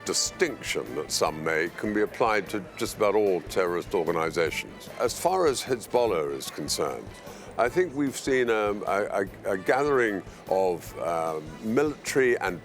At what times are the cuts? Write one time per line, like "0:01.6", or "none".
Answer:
0:04.9